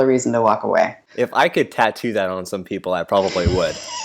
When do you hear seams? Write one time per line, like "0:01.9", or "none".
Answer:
0:01.0